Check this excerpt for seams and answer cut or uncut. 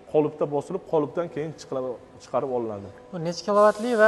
uncut